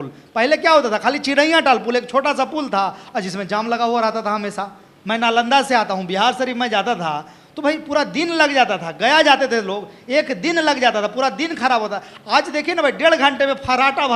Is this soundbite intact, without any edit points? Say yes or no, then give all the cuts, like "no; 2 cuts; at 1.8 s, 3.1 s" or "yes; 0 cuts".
yes; 0 cuts